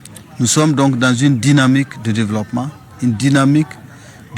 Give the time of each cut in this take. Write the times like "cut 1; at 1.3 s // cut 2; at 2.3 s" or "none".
cut 1; at 2.8 s